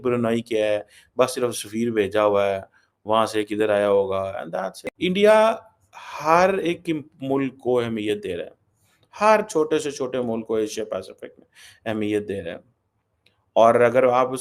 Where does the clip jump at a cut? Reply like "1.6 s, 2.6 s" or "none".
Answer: 4.8 s